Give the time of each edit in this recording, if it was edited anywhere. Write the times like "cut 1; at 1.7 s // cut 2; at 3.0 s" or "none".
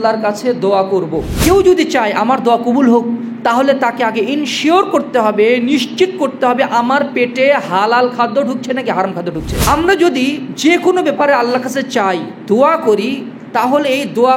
cut 1; at 1.4 s // cut 2; at 9.5 s